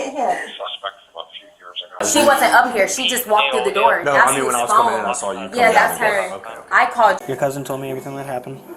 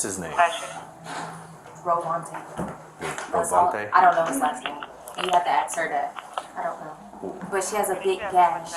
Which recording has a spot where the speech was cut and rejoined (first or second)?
first